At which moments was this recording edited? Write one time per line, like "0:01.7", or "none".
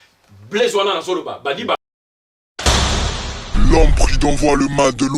0:01.8